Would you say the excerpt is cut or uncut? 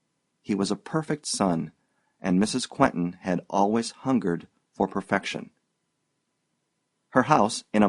cut